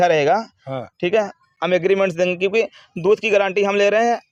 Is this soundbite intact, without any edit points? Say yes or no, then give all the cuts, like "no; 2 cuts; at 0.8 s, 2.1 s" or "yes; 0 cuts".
yes; 0 cuts